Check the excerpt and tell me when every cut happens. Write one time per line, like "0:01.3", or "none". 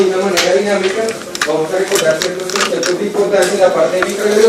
0:03.5